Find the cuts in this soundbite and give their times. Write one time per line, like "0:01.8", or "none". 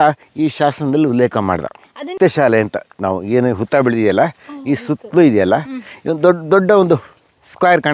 0:02.1